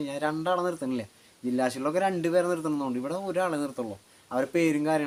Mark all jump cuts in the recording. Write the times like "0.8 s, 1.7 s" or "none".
none